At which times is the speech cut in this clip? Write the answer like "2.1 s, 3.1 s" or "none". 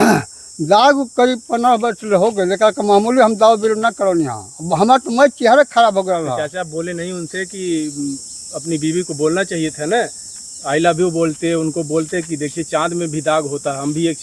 none

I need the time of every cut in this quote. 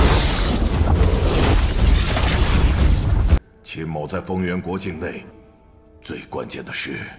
3.4 s

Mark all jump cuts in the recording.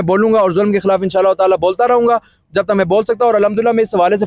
none

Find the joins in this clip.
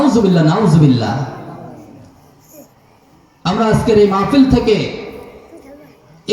3.1 s

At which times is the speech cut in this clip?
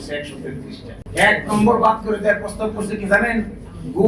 0.9 s

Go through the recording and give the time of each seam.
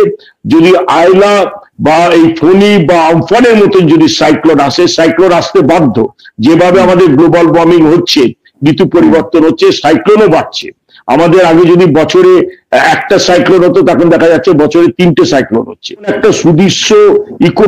16.1 s

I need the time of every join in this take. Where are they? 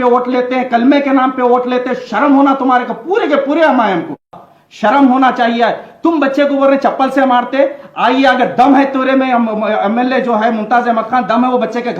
4.4 s

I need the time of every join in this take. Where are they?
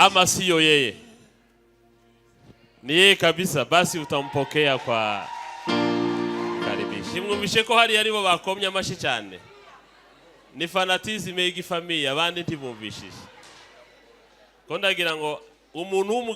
7.1 s

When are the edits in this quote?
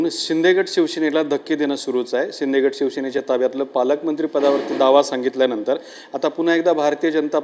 3.5 s

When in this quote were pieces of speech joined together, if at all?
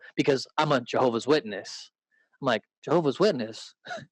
2.7 s

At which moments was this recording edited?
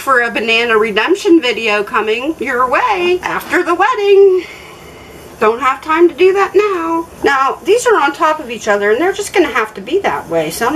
none

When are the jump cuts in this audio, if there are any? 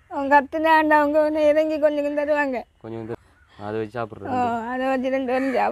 3.1 s

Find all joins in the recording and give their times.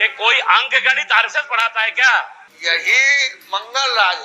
2.4 s

